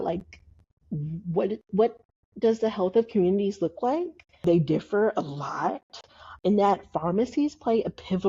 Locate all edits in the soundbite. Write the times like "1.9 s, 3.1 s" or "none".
4.4 s, 6.4 s

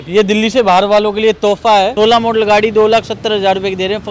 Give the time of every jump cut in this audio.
1.9 s

